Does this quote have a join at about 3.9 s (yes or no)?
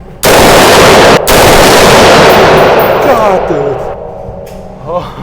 yes